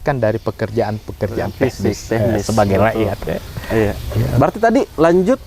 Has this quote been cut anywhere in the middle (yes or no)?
no